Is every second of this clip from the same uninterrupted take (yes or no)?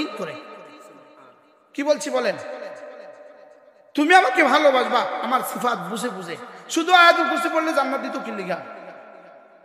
yes